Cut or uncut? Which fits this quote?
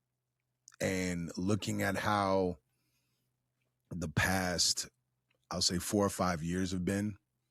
uncut